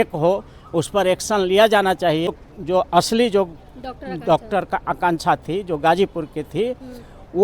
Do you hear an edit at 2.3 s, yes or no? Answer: yes